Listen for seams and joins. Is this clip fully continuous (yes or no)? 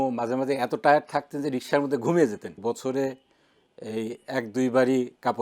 no